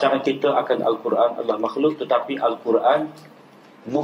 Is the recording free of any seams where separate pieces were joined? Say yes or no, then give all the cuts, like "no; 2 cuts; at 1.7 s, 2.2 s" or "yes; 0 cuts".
yes; 0 cuts